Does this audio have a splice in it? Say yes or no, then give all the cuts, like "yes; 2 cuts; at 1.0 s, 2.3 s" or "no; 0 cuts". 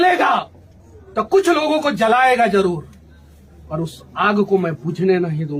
no; 0 cuts